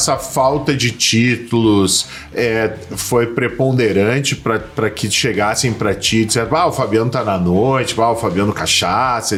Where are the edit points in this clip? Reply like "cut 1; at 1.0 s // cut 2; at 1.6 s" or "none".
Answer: none